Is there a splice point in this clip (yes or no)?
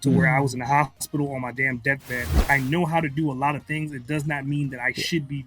yes